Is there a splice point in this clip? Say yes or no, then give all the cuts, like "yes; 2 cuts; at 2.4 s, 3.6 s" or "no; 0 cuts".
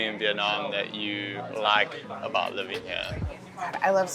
no; 0 cuts